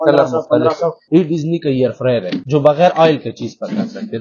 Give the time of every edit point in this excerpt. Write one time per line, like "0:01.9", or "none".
0:01.0
0:02.4